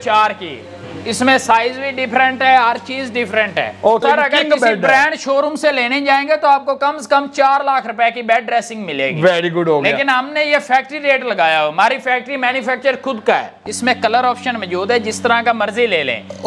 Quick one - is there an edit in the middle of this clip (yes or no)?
yes